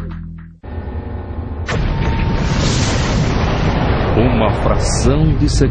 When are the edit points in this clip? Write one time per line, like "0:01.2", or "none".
none

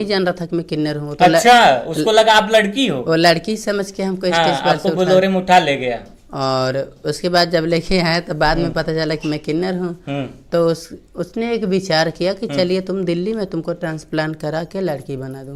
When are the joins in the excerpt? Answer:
none

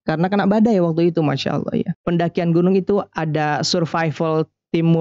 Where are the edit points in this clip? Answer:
0:02.0

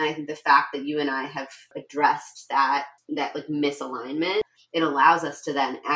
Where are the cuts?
0:01.8
0:03.0
0:04.6

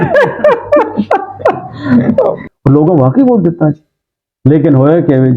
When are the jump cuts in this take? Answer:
0:02.5

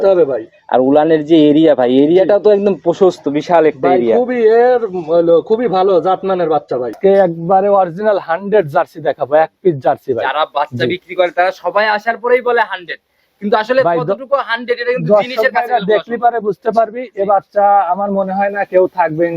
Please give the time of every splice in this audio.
0:06.9

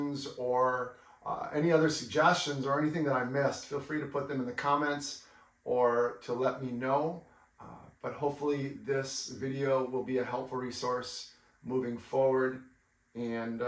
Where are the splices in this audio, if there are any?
none

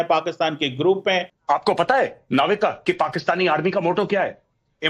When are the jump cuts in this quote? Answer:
0:01.3

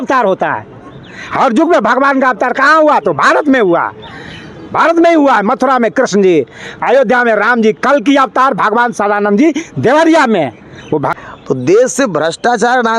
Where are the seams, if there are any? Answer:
0:11.1

